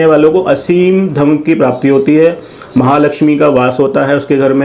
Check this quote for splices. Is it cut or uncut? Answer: uncut